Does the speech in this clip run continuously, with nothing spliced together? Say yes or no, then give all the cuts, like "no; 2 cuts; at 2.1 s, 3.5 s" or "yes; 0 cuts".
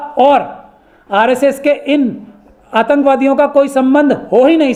yes; 0 cuts